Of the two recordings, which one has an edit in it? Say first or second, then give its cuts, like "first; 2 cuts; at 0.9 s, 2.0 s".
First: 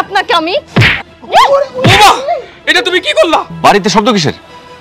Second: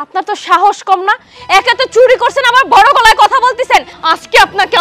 first; 1 cut; at 3.5 s